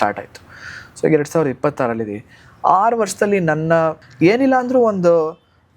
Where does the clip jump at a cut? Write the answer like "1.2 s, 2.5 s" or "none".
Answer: 4.0 s